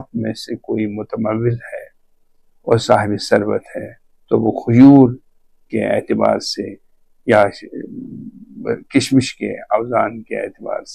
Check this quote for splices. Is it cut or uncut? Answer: uncut